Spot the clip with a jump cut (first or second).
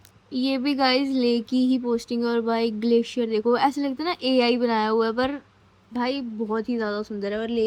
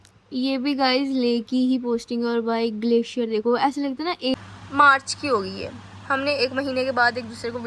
second